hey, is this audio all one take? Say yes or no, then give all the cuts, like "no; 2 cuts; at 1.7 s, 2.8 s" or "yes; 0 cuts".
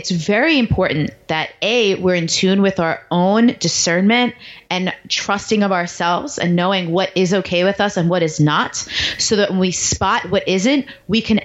yes; 0 cuts